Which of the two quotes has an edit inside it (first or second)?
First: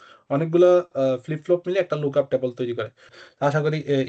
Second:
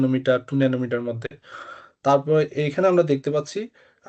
first